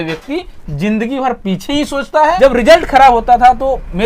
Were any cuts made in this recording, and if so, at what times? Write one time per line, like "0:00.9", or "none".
0:02.4